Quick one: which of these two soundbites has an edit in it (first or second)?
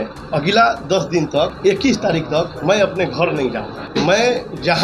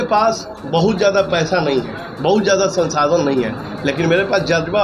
first